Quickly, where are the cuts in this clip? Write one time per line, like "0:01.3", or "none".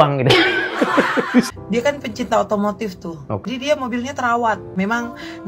0:01.5
0:03.5
0:04.8